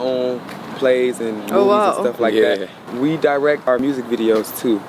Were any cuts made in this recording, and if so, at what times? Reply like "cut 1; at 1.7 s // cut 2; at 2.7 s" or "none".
cut 1; at 2.8 s // cut 2; at 3.7 s